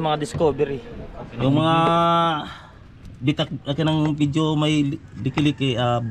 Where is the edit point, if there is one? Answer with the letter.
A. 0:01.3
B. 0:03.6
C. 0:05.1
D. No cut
A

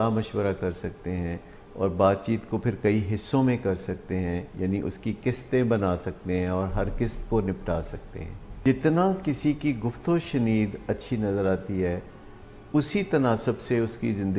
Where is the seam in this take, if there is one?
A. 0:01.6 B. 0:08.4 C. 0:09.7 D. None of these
B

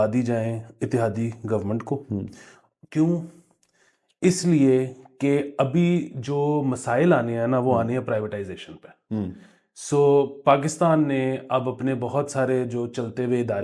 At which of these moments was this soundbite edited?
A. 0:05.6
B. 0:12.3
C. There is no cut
C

